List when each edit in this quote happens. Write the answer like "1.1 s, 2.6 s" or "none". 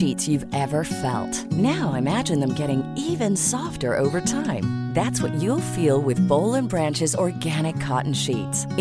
none

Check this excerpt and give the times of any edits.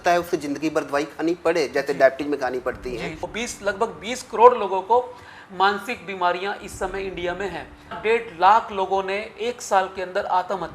3.3 s, 8.0 s

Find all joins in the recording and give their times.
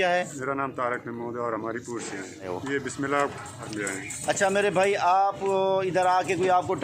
2.5 s, 3.7 s

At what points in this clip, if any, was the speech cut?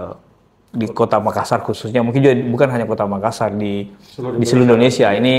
none

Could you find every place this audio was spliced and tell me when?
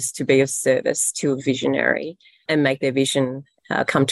2.4 s

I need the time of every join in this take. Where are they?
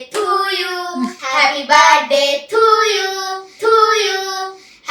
1.2 s

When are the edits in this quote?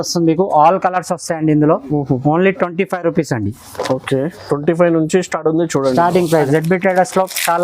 6.4 s

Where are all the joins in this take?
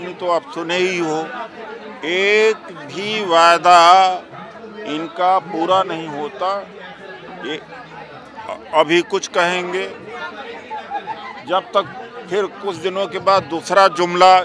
none

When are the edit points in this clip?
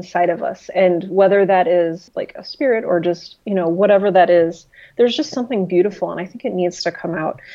2.1 s

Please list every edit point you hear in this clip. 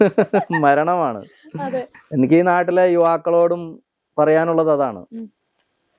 1.9 s

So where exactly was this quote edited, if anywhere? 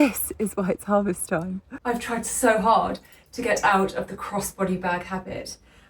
1.7 s

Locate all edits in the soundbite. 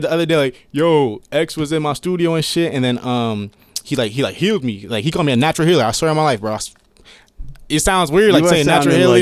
none

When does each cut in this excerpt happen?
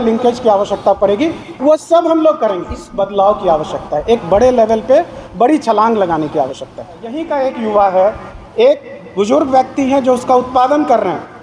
2.8 s, 7.2 s

